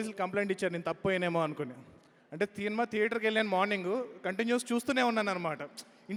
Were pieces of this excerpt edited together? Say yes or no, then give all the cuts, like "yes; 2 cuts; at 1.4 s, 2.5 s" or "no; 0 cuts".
no; 0 cuts